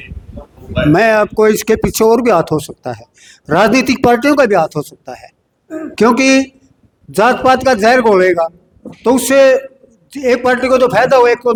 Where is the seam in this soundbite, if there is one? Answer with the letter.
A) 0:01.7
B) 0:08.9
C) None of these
C